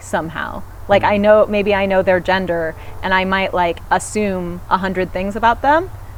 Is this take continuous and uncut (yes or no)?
yes